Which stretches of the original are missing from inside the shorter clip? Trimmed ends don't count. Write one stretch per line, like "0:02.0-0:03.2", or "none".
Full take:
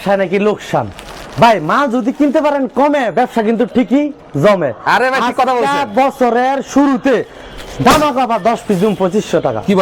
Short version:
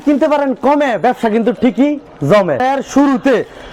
0:04.7-0:06.4